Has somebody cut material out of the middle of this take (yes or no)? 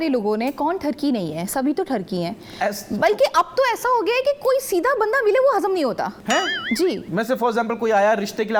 no